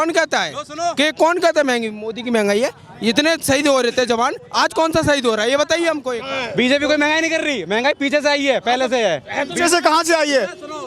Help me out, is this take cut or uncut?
cut